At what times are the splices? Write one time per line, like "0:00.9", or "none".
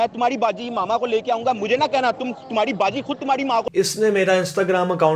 0:03.7